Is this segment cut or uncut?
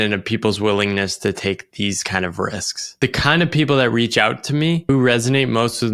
cut